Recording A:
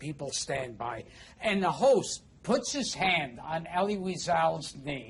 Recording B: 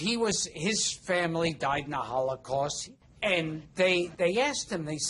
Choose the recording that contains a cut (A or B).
B